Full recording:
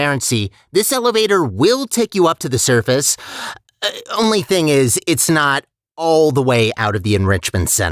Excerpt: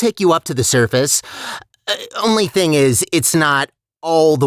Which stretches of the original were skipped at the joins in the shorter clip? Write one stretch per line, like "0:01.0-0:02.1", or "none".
none